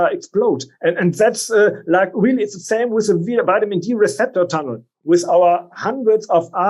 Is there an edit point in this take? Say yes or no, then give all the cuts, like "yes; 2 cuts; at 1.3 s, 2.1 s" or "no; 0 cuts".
yes; 1 cut; at 4.9 s